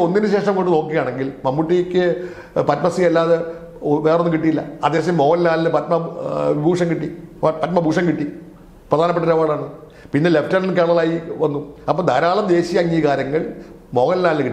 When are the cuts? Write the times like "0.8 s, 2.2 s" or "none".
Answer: none